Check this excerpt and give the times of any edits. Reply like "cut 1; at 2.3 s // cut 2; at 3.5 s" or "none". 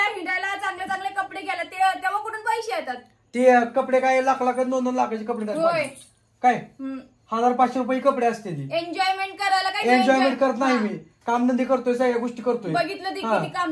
none